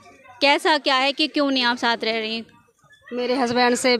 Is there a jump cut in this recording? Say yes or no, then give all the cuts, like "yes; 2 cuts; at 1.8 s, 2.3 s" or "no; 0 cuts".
no; 0 cuts